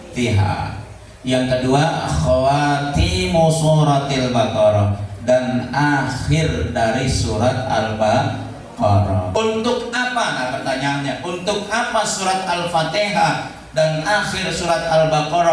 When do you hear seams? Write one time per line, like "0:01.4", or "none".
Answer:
0:09.3